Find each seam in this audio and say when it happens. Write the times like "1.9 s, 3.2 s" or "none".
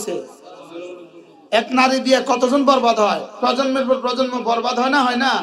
3.3 s

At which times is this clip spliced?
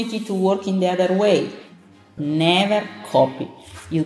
1.6 s

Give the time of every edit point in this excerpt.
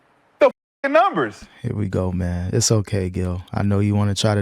1.4 s

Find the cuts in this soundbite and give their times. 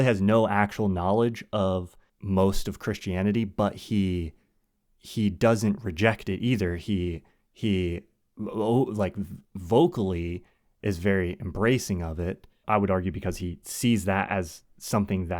2.1 s, 12.6 s

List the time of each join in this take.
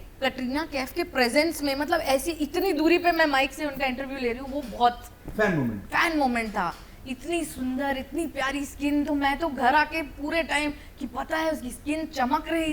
none

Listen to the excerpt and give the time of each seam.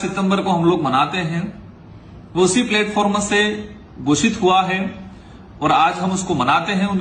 none

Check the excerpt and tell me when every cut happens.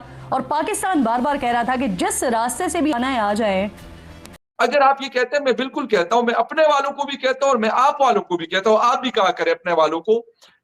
4.4 s

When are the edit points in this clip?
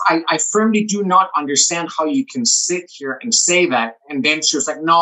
none

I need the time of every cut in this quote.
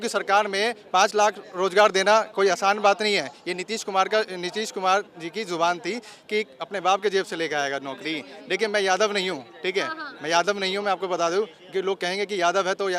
none

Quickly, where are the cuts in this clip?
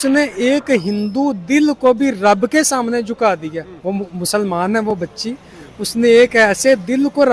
3.7 s

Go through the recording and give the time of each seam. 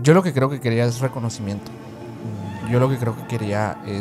none

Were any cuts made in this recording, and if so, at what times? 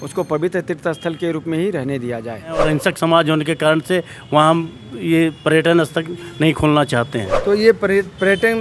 2.6 s, 7.3 s

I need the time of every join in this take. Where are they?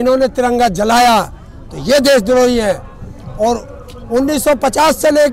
none

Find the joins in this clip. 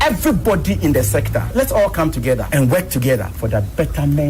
1.4 s, 2.4 s, 3.3 s

